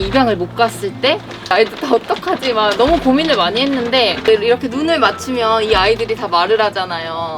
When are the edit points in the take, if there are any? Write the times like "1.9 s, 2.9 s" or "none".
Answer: 1.5 s, 4.3 s